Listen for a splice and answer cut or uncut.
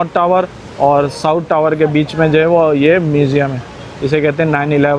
uncut